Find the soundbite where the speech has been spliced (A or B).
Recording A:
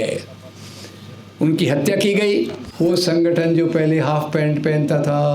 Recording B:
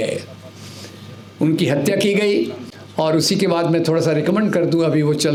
A